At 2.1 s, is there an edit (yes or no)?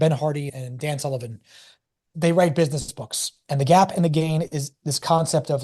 yes